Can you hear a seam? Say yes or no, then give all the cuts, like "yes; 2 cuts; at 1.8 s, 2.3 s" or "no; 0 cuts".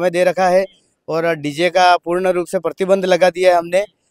no; 0 cuts